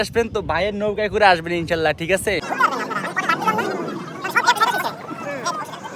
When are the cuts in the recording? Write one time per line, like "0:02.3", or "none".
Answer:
0:02.5